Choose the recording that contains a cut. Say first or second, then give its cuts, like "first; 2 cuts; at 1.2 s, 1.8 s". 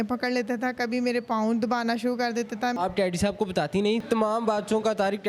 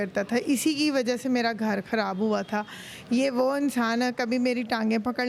first; 2 cuts; at 2.8 s, 4.0 s